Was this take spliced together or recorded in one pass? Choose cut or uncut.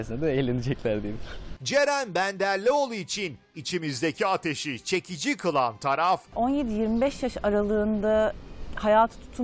uncut